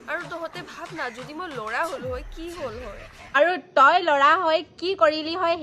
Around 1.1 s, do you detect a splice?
no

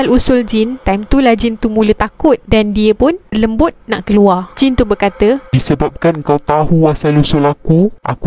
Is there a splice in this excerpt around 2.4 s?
no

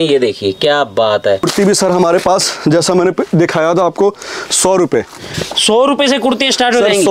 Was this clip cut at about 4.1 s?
no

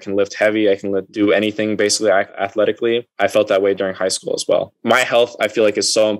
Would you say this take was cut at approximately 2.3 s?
yes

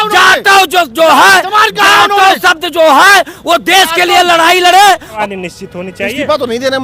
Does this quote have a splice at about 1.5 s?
no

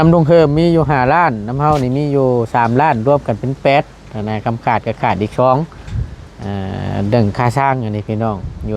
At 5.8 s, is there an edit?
no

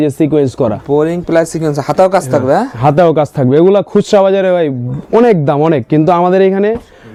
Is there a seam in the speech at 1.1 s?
no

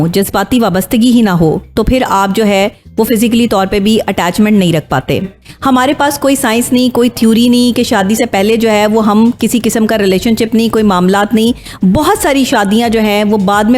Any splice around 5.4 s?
yes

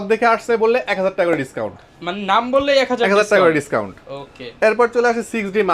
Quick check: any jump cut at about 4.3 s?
no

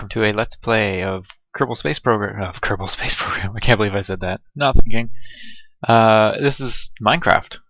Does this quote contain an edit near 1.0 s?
no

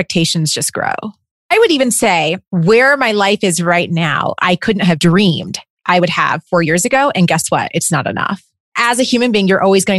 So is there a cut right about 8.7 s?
yes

